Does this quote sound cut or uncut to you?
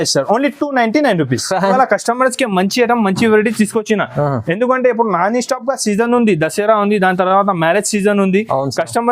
cut